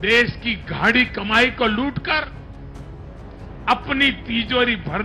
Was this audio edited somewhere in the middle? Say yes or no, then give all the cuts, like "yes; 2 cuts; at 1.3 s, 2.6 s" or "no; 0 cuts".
no; 0 cuts